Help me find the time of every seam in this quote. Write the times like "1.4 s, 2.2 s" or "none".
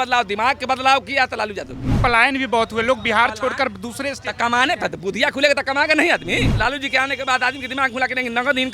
2.0 s, 6.5 s